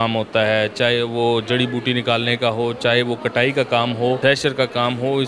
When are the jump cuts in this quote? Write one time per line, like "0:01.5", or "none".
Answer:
0:04.2